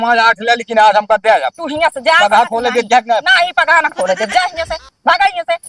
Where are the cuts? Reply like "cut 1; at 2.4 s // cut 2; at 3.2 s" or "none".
none